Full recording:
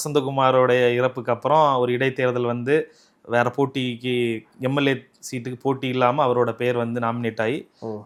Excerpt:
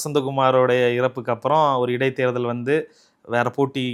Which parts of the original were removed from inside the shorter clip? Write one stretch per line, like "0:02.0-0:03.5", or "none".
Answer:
none